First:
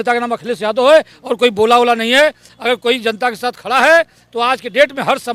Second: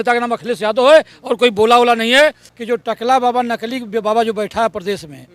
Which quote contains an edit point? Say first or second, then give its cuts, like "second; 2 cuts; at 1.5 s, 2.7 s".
second; 1 cut; at 2.5 s